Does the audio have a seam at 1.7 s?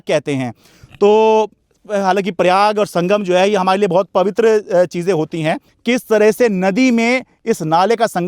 no; 1 cut; at 5.7 s

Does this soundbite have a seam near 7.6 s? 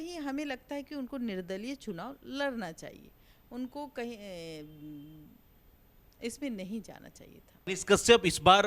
yes; 1 cut; at 7.6 s

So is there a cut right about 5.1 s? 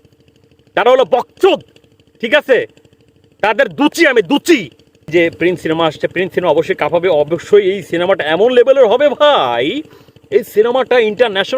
yes; 1 cut; at 5.1 s

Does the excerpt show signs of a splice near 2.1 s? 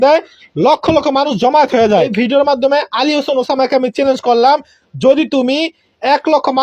yes; 1 cut; at 2.1 s

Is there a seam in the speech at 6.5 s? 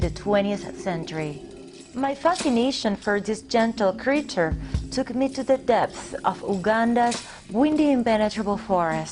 yes; 1 cut; at 6.5 s

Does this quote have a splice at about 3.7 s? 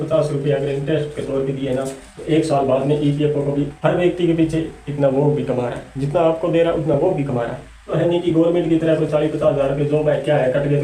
yes; 2 cuts; at 3.7 s, 7.9 s

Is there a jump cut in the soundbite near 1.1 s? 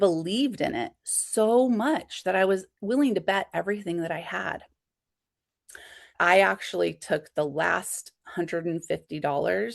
no; 1 cut; at 6.1 s

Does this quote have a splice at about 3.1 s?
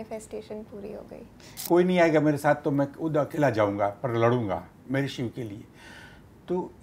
no; 1 cut; at 1.6 s

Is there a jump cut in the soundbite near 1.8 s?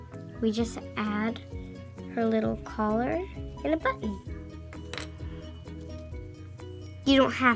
no; 0 cuts

